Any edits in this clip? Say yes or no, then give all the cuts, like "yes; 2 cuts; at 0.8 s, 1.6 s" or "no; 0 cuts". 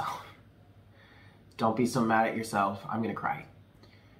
no; 0 cuts